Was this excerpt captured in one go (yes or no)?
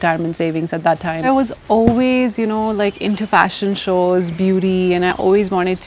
no